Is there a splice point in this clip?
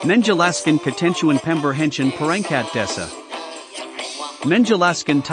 no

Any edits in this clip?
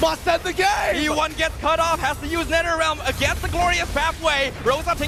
no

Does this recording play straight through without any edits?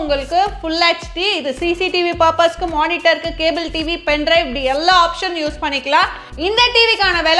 yes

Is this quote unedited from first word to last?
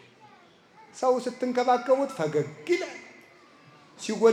yes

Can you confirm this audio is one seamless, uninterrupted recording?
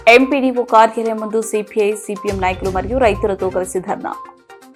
yes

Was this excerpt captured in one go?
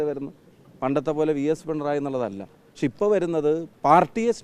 yes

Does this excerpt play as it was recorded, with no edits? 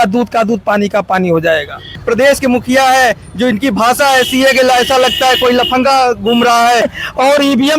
no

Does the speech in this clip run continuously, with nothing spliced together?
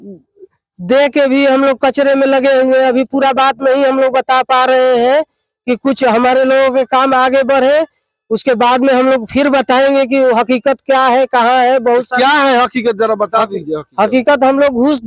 yes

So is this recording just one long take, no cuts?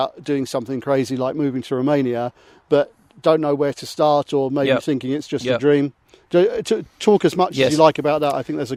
yes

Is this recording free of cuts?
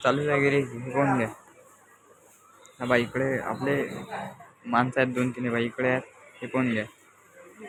yes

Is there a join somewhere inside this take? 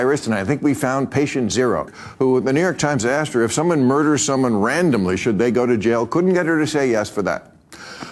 yes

